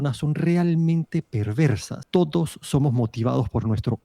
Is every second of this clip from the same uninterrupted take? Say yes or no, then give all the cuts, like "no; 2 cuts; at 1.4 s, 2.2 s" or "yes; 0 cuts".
no; 1 cut; at 1.9 s